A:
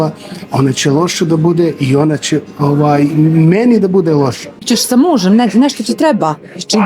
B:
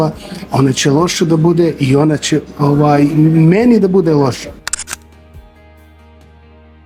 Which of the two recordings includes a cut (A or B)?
A